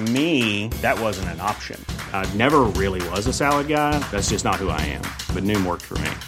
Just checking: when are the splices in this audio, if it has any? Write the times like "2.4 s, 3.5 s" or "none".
none